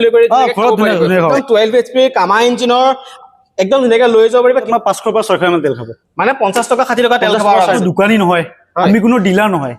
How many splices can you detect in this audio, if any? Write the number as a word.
three